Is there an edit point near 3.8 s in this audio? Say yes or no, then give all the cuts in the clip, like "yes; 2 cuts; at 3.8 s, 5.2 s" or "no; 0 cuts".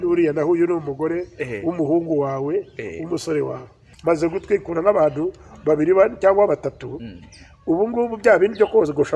yes; 1 cut; at 3.8 s